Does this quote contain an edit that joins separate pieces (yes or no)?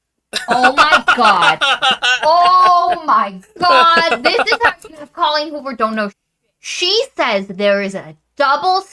yes